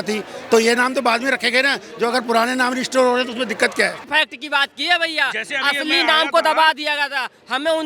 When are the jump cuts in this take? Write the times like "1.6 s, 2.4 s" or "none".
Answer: 4.1 s